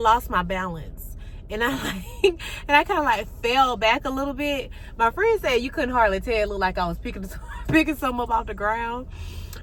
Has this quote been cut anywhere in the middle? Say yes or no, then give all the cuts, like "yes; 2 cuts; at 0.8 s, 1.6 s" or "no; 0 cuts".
no; 0 cuts